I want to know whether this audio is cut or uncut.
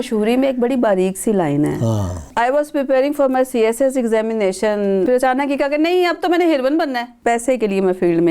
cut